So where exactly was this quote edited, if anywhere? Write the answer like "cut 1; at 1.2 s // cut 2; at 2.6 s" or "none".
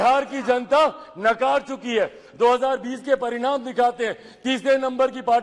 none